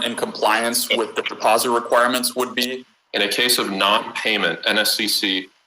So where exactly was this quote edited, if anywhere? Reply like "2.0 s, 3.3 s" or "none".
2.8 s